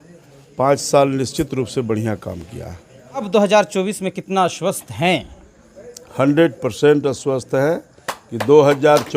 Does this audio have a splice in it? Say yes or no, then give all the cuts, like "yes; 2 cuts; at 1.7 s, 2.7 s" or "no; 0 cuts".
yes; 1 cut; at 3.3 s